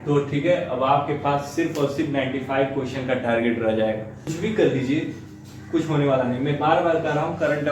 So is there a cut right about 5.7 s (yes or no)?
no